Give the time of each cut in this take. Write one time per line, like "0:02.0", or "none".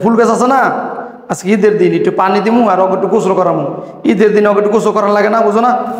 none

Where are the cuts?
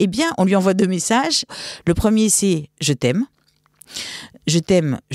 0:01.6

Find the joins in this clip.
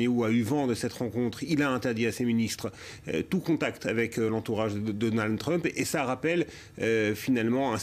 0:05.9

